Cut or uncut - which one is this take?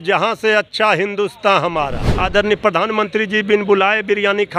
cut